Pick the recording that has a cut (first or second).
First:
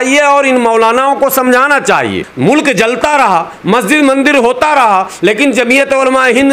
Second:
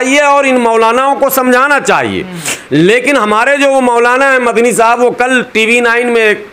first